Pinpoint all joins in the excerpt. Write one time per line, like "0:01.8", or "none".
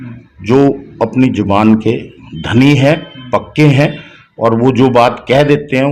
none

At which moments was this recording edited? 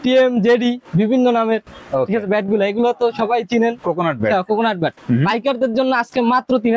none

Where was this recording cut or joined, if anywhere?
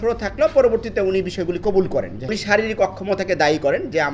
0:02.3

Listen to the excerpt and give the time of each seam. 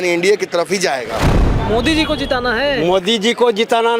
0:01.4

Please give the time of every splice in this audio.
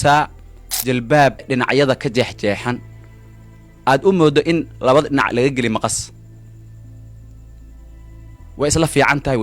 0:01.4

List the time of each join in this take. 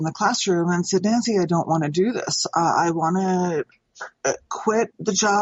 none

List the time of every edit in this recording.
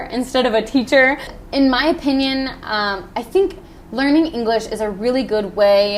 0:01.3

